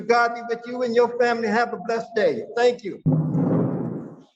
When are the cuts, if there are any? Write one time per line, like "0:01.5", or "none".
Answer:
none